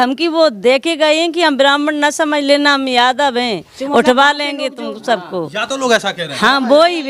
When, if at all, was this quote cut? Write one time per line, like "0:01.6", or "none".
none